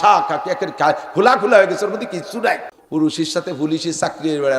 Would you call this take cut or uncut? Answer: cut